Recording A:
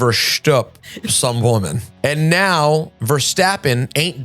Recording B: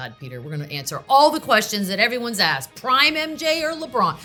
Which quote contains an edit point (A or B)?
A